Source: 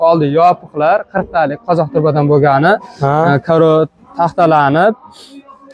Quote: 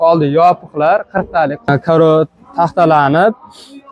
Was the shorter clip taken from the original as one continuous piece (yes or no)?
no